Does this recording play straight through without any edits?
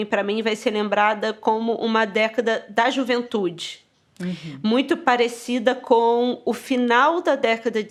yes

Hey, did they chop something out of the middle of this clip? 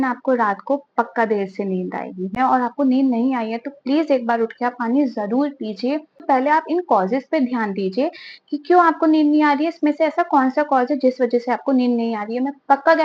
yes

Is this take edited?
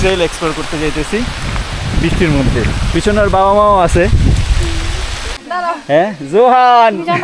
yes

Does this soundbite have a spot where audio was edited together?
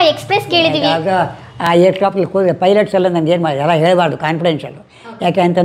no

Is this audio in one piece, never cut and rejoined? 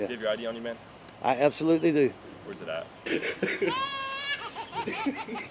yes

